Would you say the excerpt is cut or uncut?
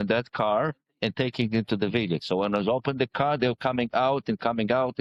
uncut